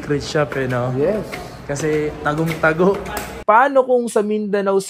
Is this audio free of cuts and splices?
no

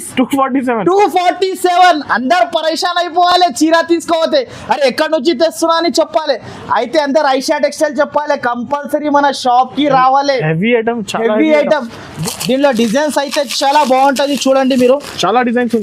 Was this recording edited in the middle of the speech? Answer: no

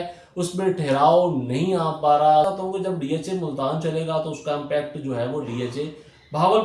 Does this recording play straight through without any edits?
no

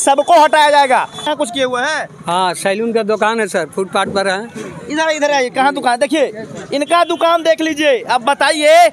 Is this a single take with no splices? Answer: no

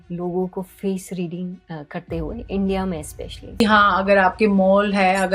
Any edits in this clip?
yes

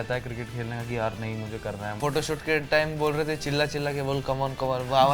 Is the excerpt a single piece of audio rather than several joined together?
no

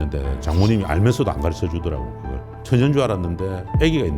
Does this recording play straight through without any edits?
no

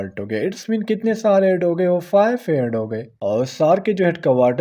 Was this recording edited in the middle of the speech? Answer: yes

